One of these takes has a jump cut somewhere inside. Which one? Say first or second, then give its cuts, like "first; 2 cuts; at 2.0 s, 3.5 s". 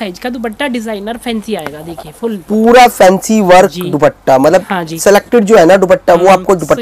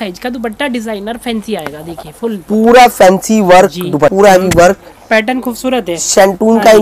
second; 1 cut; at 4.1 s